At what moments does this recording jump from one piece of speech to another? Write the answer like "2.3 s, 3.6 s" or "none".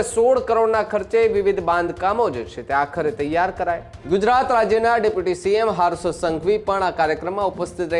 3.9 s